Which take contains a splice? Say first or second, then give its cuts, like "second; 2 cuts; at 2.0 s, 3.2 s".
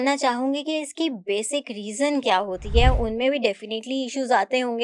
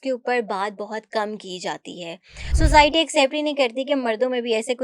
second; 1 cut; at 2.4 s